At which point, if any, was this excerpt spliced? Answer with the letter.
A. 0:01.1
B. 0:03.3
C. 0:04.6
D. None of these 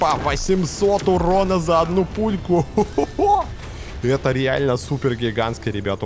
D